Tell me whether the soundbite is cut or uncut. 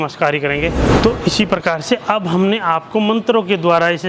cut